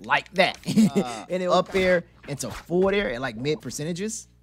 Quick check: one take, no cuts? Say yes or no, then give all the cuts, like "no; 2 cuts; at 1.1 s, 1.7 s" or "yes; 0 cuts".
no; 1 cut; at 1.2 s